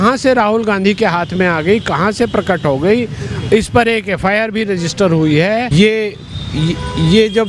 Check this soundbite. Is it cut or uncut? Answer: cut